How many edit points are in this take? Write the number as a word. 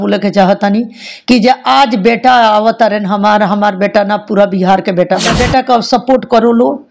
one